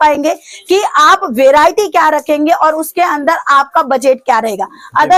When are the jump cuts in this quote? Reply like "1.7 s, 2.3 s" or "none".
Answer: none